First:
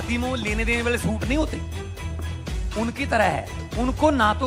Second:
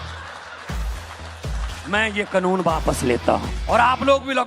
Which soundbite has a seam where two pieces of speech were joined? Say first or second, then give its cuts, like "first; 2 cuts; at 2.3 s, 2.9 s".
second; 1 cut; at 3.5 s